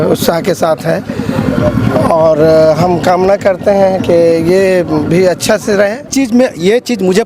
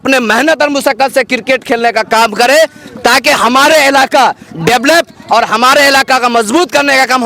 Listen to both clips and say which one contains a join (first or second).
first